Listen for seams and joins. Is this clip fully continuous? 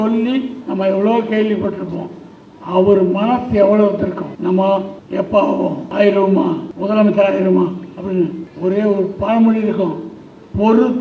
no; 5 cuts; at 4.3 s, 5.0 s, 5.8 s, 6.7 s, 8.4 s

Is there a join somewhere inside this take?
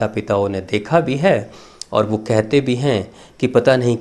no; 0 cuts

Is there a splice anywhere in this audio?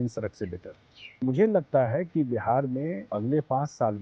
yes; 2 cuts; at 1.2 s, 3.1 s

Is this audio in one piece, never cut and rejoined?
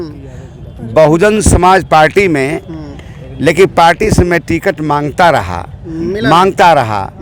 yes; 0 cuts

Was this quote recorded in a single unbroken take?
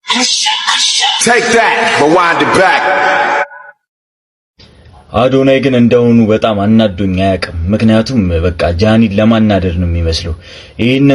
yes; 0 cuts

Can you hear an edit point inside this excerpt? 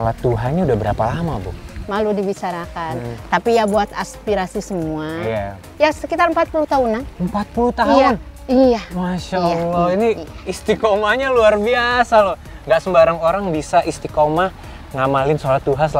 no; 0 cuts

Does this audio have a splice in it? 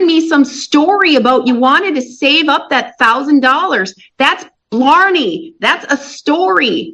no; 0 cuts

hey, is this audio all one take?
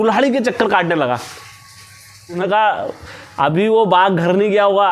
no; 1 cut; at 2.4 s

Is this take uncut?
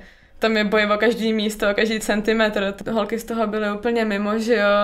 no; 1 cut; at 2.8 s

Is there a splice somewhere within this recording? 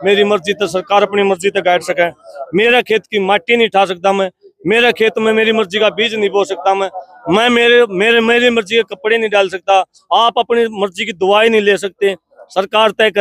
no; 0 cuts

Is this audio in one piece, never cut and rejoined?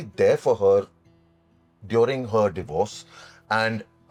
yes; 0 cuts

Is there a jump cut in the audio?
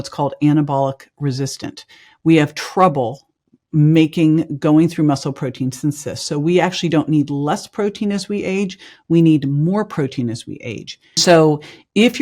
yes; 1 cut; at 11.2 s

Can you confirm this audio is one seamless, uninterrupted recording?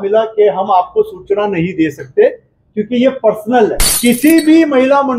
no; 1 cut; at 3.9 s

